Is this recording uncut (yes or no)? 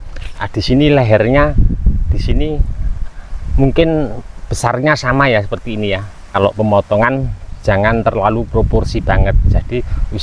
no